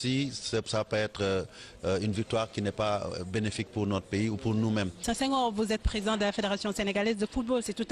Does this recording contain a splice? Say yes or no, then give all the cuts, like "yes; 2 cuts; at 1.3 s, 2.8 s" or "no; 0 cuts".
yes; 1 cut; at 4.5 s